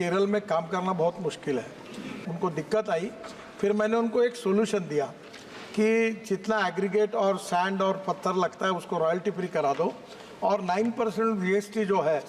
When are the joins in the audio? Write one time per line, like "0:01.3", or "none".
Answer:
0:02.2